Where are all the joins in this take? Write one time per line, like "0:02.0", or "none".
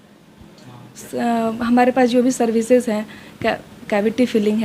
0:01.0